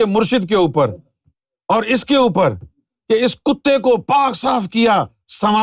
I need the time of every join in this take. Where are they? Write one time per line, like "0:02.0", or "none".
none